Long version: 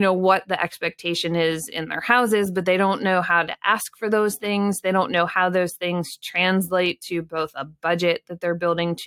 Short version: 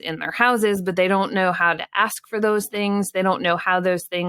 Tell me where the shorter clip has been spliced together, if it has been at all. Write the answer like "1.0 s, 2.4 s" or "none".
none